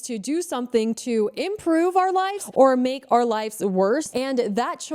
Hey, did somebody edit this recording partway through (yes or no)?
yes